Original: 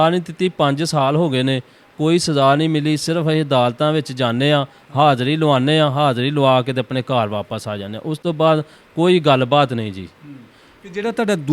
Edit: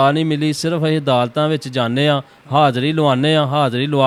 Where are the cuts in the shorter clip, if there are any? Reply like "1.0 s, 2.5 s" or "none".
none